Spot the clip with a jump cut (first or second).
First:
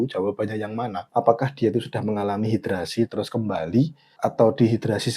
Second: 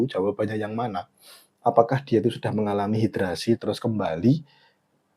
first